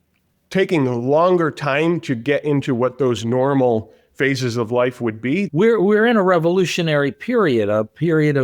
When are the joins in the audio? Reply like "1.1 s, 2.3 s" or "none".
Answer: 5.5 s